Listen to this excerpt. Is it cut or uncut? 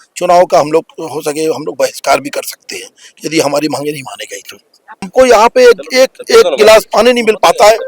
cut